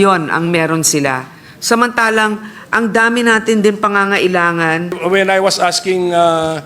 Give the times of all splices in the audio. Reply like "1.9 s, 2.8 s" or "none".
5.0 s